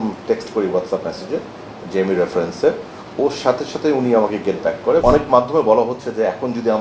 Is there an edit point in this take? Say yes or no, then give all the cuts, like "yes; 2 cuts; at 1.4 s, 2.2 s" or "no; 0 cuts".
yes; 1 cut; at 5.0 s